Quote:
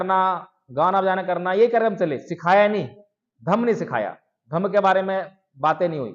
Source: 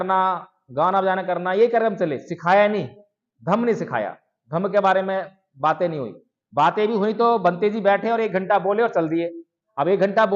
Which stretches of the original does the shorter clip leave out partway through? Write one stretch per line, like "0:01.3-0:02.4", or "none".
none